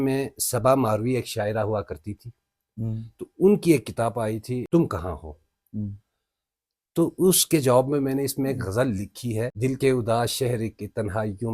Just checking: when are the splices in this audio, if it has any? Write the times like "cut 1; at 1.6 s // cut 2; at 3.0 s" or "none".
cut 1; at 4.7 s // cut 2; at 9.5 s